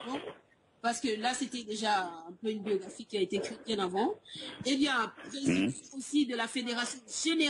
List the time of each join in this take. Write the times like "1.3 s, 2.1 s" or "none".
none